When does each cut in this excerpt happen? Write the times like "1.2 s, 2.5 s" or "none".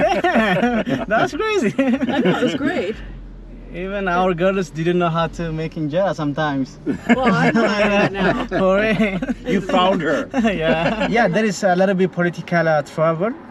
11.1 s

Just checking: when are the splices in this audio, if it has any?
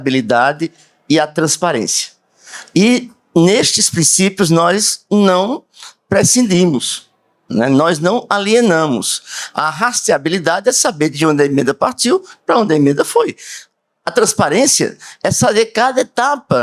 none

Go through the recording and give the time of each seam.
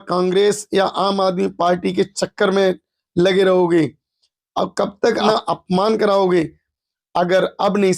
5.3 s

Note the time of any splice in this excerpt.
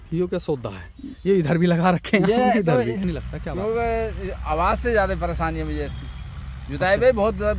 3.0 s

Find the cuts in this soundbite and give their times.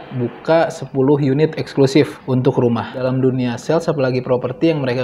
2.2 s, 3.0 s

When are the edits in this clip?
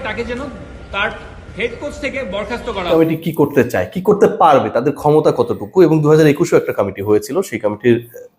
2.9 s

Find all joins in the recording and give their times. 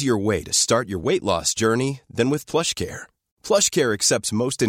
none

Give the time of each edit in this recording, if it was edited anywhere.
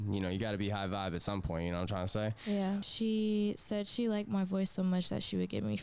2.9 s

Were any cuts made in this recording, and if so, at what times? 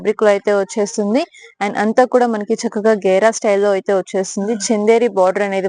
none

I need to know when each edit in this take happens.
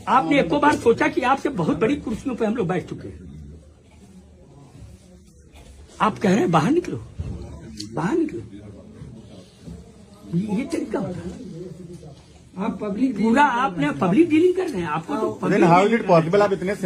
none

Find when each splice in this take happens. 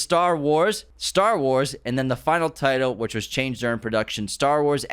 0.9 s

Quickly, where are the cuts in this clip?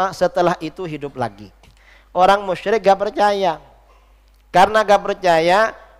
none

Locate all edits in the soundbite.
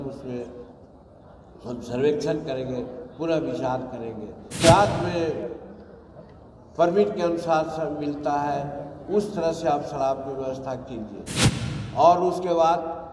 4.6 s

